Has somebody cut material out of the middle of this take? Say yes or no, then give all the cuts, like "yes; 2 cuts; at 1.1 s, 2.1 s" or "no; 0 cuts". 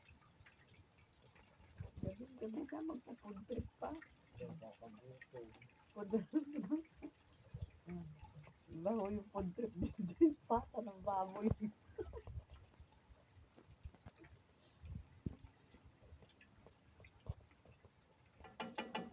no; 0 cuts